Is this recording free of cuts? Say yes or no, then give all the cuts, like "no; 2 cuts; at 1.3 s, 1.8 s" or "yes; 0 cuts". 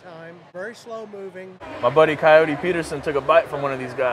no; 1 cut; at 1.6 s